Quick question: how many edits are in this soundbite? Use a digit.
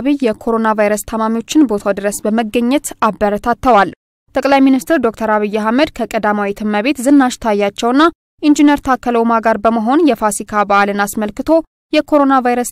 0